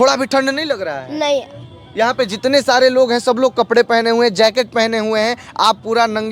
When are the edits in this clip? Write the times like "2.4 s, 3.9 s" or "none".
none